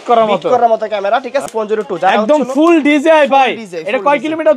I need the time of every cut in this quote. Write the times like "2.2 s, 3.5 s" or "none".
1.5 s